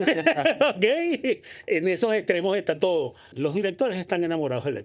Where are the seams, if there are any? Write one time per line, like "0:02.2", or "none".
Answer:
0:03.2

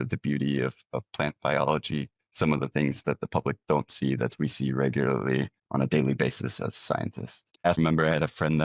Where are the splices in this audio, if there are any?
0:07.7

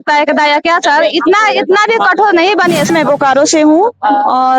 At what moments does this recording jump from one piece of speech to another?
0:02.9

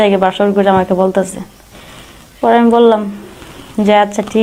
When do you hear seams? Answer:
none

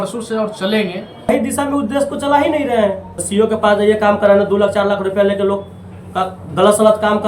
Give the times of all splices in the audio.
0:01.3
0:03.2

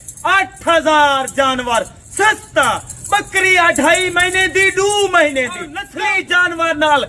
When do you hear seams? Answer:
0:05.8

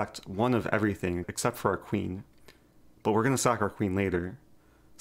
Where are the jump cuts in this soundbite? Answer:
0:01.3

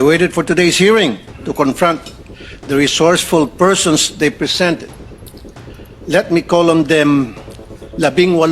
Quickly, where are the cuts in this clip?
none

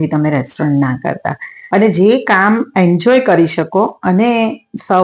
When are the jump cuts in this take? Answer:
0:01.6

